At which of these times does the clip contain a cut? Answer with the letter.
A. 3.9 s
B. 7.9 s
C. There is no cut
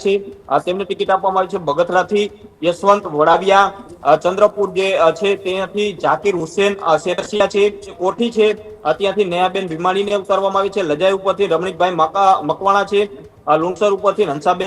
B